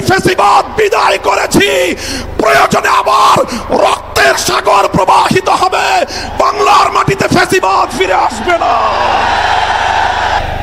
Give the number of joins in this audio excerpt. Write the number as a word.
zero